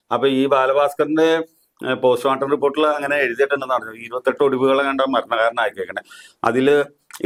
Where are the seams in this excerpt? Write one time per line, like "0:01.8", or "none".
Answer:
none